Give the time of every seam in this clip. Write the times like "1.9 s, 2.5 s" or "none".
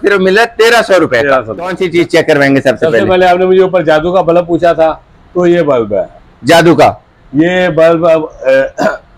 1.8 s